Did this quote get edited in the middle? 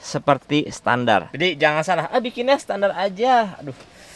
no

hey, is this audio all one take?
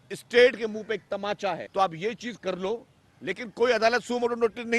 no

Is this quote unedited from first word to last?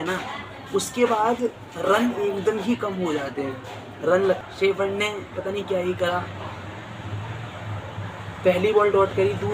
no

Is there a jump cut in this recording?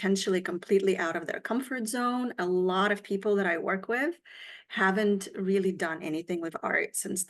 no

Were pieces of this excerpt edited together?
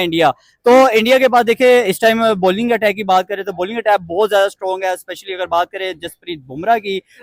no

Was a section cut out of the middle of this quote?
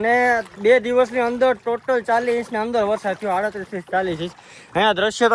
no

